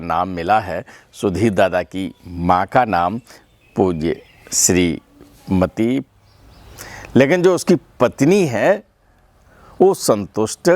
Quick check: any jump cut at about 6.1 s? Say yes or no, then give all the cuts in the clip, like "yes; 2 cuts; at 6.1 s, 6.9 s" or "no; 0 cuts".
yes; 1 cut; at 6.1 s